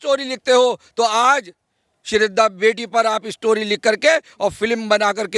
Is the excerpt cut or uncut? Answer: uncut